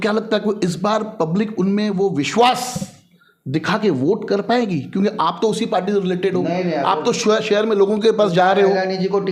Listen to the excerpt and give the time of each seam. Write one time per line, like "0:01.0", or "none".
none